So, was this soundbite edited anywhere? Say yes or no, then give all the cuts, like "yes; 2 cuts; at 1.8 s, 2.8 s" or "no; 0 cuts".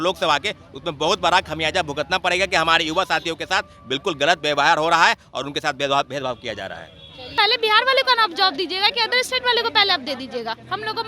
yes; 1 cut; at 7.3 s